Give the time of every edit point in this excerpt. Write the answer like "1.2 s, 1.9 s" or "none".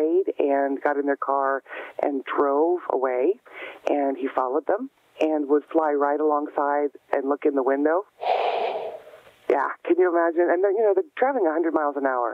none

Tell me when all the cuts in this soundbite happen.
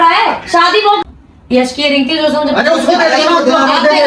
1.0 s

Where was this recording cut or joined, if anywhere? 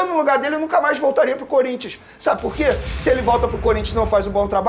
none

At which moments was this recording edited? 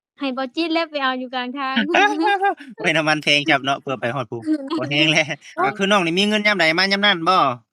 5.7 s

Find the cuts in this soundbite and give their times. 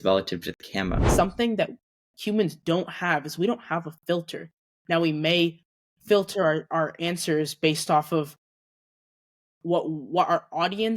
1.0 s

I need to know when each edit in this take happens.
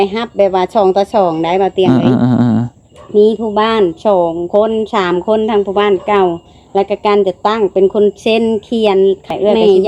none

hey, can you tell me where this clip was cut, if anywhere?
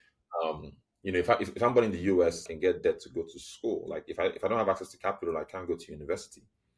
2.5 s

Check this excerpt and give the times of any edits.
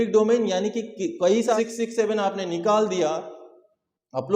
1.6 s

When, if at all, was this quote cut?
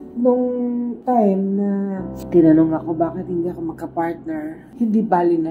2.1 s, 4.7 s

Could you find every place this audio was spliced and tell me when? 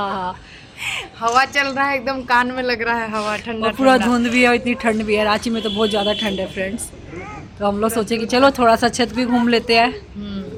none

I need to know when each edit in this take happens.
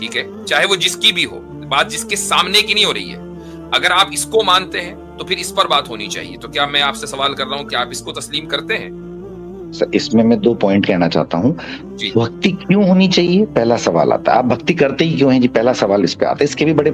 none

